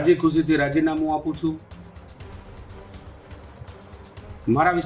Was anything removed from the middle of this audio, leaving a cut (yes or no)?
no